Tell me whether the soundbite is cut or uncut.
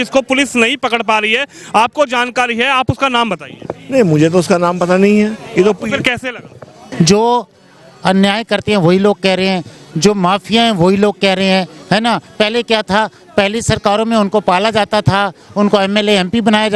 cut